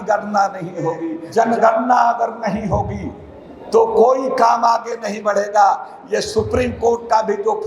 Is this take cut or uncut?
cut